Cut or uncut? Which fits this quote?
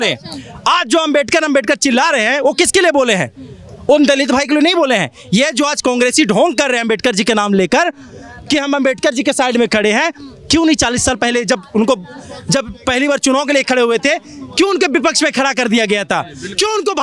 uncut